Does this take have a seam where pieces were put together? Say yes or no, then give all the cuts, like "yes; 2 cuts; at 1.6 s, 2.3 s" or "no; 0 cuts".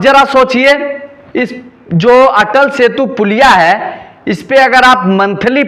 no; 0 cuts